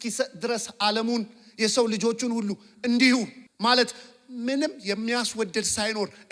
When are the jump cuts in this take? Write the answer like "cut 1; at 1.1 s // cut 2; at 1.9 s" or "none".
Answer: cut 1; at 3.4 s